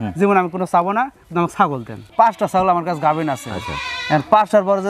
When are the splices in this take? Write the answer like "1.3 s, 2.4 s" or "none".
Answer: 2.1 s